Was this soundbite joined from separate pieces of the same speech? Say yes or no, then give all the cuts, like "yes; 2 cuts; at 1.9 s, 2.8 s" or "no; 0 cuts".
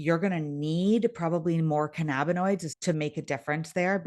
yes; 1 cut; at 2.7 s